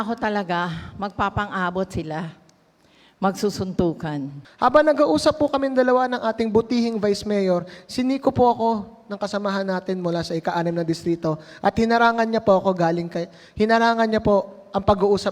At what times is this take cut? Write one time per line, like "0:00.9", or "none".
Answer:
0:04.4